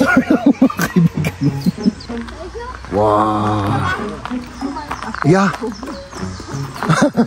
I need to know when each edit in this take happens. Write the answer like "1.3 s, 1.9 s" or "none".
2.0 s